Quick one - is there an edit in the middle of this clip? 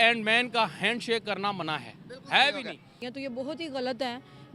no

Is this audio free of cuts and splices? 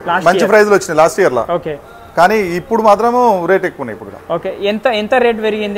yes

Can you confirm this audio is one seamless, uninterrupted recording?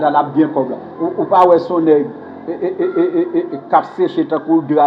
yes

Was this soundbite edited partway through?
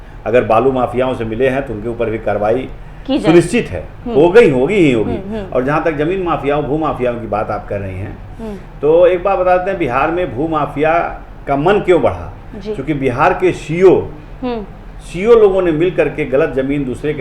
no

